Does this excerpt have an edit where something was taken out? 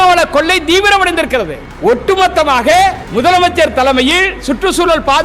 yes; 2 cuts; at 1.6 s, 3.0 s

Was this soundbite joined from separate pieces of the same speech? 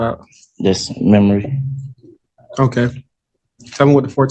no; 0 cuts

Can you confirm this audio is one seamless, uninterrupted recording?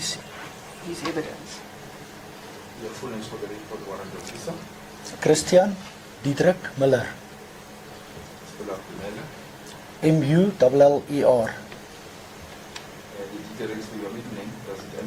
yes; 0 cuts

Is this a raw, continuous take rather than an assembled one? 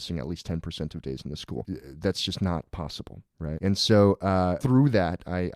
no; 3 cuts; at 1.8 s, 3.6 s, 4.6 s

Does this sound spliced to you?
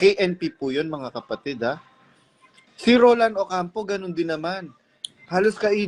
no; 0 cuts

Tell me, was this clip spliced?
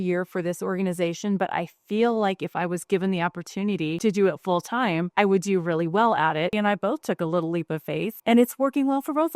no; 0 cuts

